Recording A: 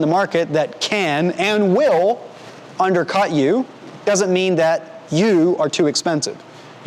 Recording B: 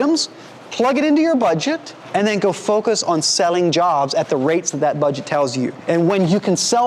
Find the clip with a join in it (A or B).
B